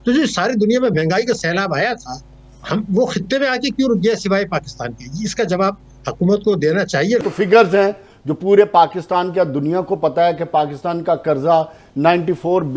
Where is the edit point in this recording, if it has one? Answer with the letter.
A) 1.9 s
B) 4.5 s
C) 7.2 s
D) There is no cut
C